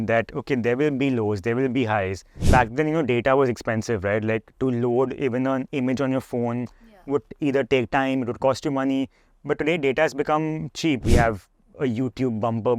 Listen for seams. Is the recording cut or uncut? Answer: cut